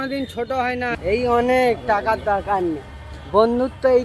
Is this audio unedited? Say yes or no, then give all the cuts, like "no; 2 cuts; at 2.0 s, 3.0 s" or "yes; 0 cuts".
no; 1 cut; at 0.9 s